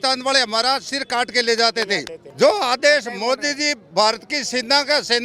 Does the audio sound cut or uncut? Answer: cut